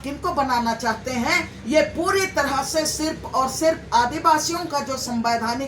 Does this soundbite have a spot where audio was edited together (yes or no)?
no